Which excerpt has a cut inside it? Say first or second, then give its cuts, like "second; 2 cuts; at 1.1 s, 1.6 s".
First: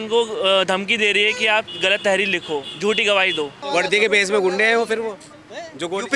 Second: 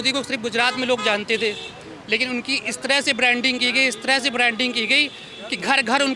first; 1 cut; at 3.6 s